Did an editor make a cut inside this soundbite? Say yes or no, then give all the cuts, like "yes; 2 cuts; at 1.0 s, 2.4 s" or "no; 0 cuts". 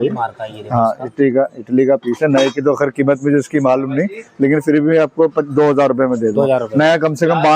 no; 0 cuts